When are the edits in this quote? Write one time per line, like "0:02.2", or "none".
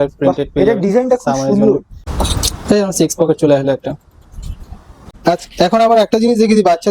0:02.0
0:05.0